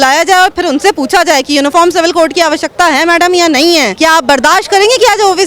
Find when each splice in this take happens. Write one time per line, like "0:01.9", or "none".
0:03.9